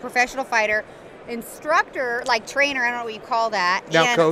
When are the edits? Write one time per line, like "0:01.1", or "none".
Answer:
none